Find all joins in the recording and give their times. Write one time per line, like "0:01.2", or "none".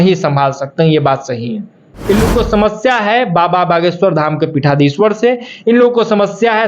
0:01.9